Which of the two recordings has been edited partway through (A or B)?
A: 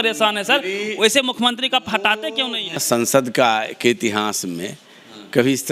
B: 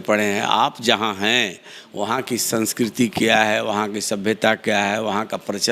A